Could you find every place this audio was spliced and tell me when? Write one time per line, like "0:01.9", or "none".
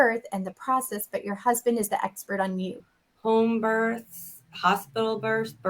0:02.8